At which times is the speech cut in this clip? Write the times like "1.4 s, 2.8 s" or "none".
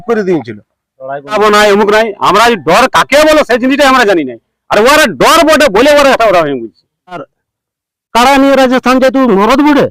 1.3 s, 7.4 s